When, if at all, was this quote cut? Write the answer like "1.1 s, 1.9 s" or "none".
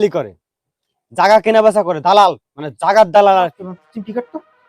3.8 s